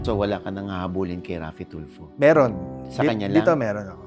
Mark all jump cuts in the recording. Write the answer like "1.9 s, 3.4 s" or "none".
none